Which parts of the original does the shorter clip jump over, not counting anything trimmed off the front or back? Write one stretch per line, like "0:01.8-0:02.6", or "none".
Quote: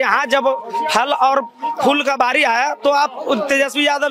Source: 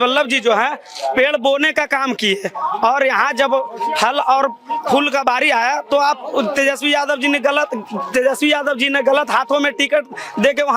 none